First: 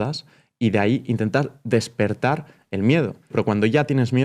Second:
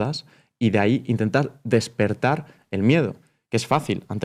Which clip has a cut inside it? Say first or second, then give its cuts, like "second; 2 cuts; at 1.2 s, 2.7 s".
first; 1 cut; at 3.3 s